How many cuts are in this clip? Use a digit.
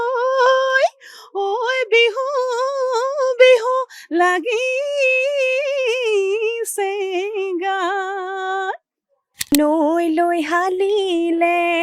1